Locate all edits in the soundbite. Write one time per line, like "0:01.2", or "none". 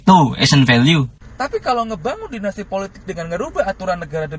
0:01.2